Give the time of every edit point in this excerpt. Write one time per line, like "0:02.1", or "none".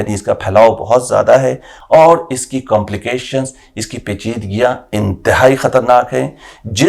0:01.7